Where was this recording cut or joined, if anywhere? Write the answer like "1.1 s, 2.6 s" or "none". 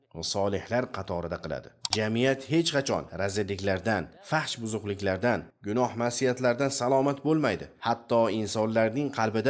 1.8 s